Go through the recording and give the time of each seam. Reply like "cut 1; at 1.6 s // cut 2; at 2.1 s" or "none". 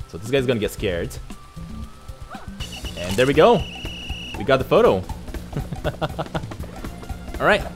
none